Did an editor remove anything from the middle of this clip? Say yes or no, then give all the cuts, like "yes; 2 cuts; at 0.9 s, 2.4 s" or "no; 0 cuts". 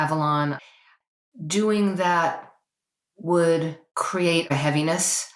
yes; 2 cuts; at 0.9 s, 4.4 s